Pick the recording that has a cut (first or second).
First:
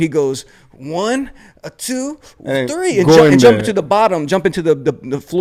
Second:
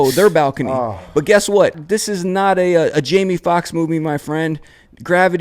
second